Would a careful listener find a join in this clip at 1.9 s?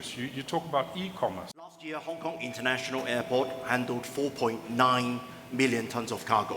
yes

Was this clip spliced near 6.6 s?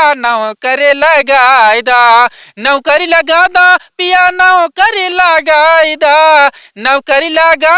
no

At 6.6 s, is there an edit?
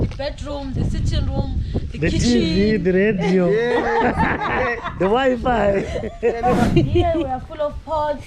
yes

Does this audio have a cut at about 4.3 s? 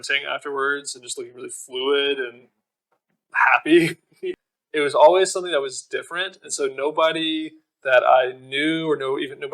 yes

